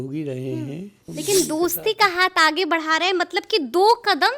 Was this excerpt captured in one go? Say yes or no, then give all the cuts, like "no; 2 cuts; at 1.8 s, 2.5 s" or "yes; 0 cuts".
no; 1 cut; at 1.1 s